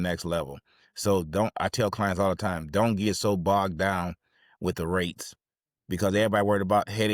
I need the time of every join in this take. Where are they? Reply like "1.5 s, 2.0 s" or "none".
none